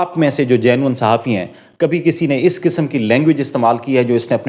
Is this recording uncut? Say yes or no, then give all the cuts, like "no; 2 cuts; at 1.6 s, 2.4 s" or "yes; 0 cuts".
yes; 0 cuts